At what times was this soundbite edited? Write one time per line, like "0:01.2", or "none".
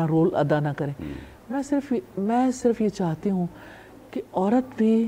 none